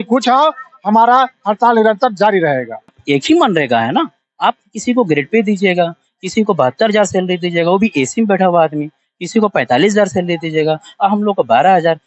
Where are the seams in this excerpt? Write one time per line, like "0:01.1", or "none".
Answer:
0:02.9